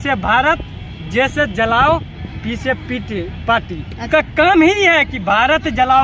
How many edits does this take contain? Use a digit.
0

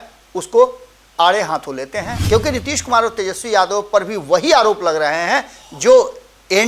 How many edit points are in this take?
1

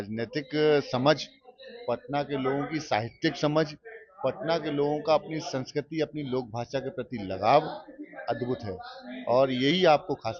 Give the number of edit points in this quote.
0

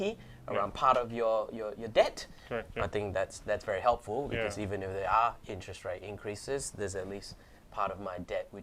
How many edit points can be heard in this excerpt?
0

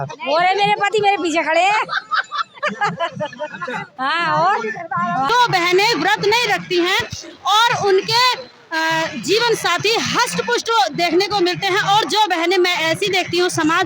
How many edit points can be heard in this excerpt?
1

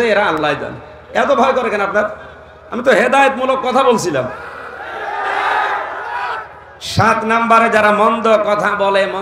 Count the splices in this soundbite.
0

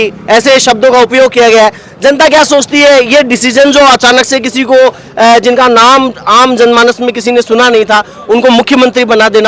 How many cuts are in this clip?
0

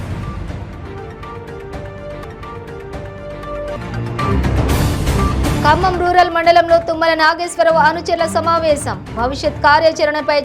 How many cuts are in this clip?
1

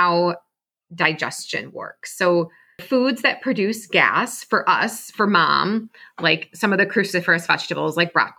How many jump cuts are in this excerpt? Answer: 1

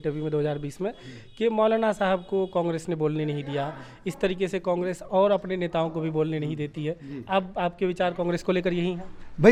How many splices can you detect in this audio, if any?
0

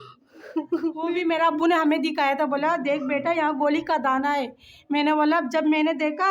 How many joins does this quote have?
1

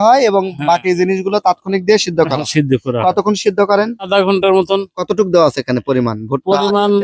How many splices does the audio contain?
1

